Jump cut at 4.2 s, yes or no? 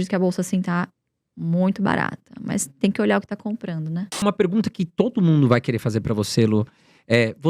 yes